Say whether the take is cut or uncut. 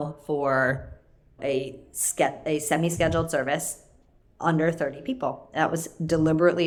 uncut